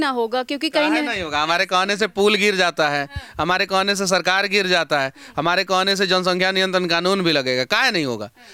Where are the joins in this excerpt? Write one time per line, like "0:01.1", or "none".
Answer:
none